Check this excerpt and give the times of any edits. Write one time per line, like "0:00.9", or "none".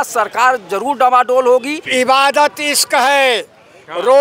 0:01.8